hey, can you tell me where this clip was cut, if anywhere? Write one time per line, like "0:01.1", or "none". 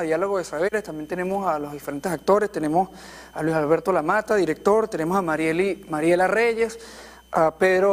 0:05.8